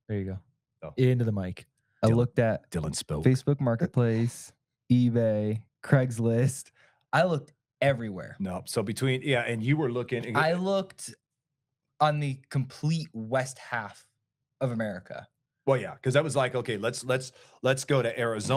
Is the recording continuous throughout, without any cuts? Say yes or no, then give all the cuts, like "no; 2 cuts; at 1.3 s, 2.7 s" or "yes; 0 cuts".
yes; 0 cuts